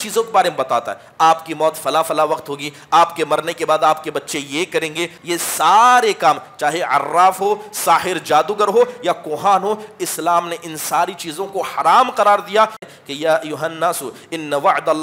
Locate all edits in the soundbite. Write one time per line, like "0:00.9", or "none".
0:05.2
0:12.8